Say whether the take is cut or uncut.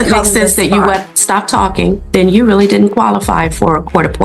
cut